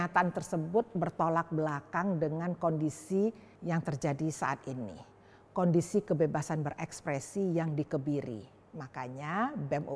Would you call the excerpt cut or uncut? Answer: uncut